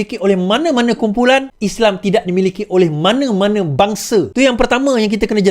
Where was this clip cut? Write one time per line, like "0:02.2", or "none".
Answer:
0:01.6
0:04.3